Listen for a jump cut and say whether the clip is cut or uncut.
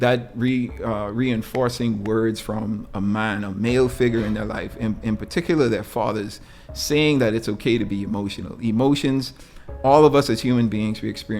uncut